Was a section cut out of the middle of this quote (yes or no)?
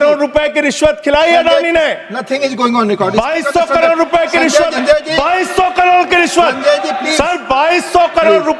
yes